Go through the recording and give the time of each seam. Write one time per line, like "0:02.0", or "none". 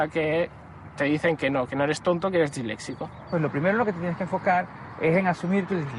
0:03.3

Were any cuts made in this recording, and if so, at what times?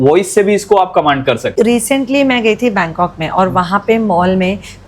0:01.5

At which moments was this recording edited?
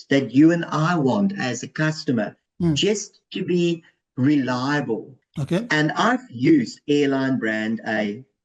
0:05.2

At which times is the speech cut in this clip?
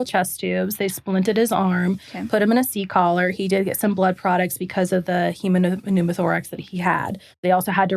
0:06.9

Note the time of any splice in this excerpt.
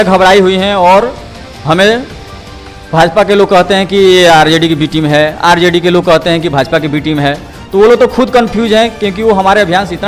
none

